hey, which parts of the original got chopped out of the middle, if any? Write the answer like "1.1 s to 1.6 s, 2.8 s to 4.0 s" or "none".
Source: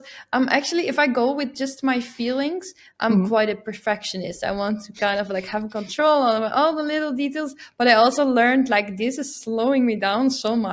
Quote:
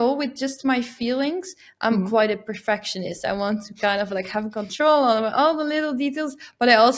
none